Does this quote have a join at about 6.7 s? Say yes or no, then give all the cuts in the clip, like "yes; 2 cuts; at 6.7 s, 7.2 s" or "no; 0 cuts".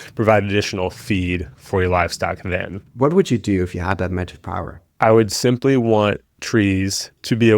no; 2 cuts; at 2.9 s, 4.8 s